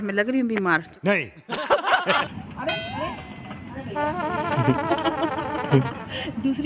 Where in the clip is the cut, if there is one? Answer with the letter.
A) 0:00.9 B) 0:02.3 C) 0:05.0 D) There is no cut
B